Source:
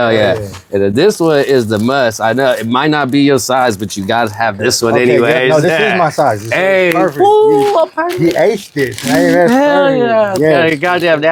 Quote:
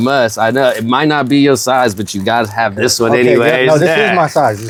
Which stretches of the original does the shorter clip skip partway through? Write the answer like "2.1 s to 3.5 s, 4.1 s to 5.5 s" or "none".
none